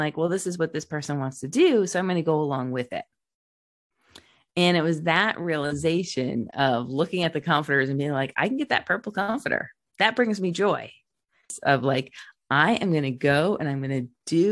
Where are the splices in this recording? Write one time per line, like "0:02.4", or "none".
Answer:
0:11.5